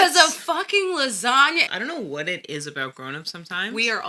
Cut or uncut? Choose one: cut